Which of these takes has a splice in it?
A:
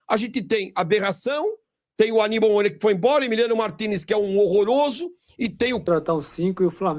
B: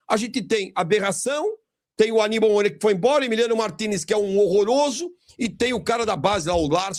A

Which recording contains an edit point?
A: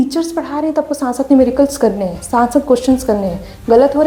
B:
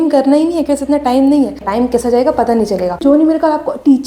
B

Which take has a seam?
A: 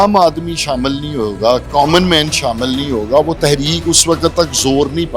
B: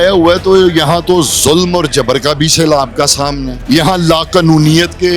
B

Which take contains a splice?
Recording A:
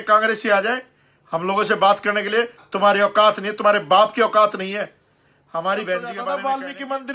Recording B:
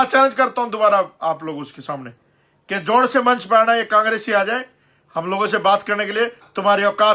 A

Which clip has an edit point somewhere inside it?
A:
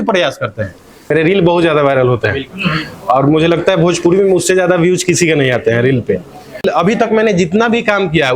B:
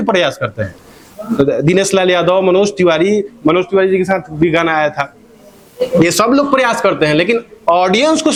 A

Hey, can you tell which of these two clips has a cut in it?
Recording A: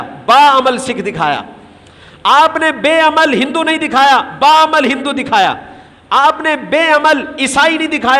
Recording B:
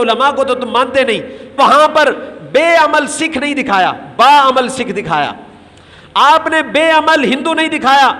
B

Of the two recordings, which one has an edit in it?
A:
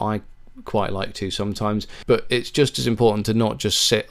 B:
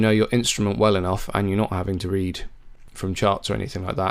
A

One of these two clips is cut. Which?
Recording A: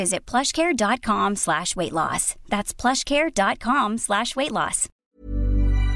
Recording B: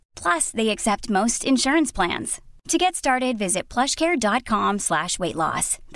A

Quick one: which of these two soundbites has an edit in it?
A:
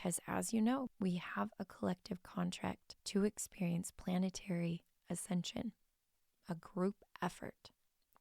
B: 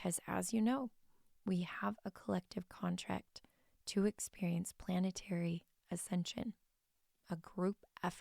A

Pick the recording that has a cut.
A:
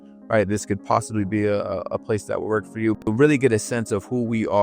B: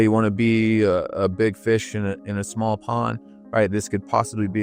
A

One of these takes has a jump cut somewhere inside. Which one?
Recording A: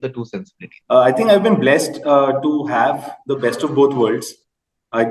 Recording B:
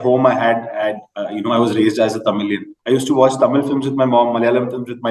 B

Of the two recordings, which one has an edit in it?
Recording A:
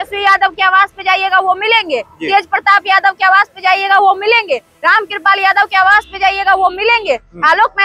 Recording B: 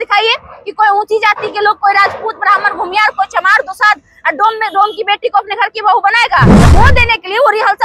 B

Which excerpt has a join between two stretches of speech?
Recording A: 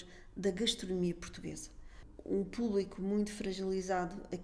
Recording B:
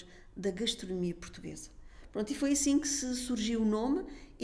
A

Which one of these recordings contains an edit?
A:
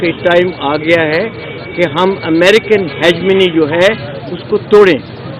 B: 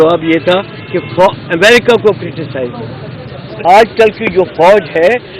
B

